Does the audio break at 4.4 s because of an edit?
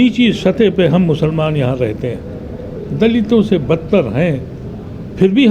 no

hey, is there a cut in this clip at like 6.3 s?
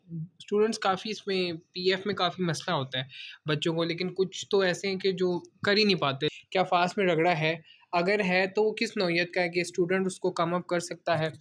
yes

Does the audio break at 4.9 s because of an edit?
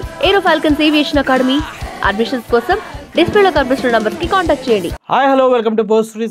yes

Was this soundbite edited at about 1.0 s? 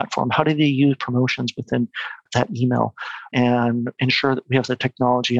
no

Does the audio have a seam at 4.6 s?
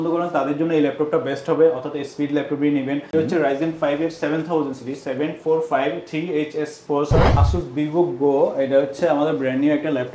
no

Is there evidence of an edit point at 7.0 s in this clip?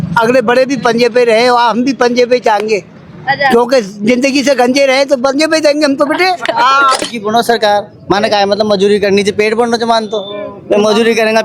yes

